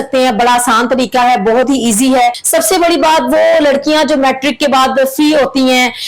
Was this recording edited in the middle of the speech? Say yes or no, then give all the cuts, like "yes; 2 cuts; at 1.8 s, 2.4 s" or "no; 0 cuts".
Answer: yes; 1 cut; at 2.4 s